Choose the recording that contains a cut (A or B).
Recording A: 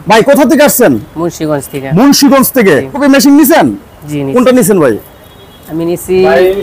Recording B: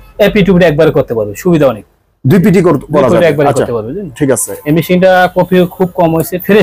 A